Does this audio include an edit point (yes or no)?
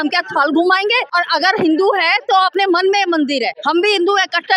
yes